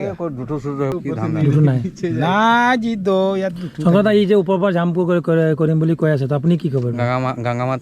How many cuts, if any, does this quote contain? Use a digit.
1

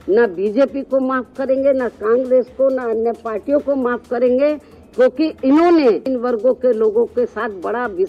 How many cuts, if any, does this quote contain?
1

